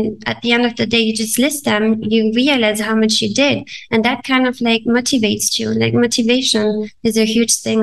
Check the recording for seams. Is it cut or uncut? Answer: uncut